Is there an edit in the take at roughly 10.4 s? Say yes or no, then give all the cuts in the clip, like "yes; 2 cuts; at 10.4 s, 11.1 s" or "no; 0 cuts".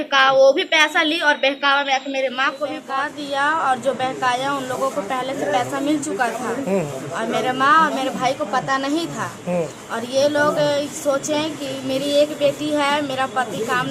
no; 1 cut; at 2.8 s